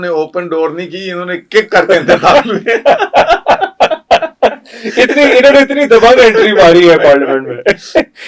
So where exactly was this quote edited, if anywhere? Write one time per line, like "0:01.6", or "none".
none